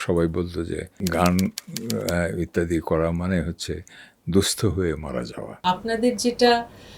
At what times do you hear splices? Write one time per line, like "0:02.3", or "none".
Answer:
0:00.9
0:05.6